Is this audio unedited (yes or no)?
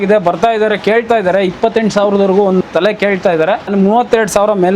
no